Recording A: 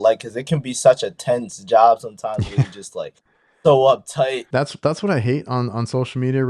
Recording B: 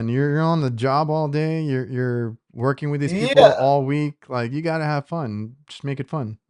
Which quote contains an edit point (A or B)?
A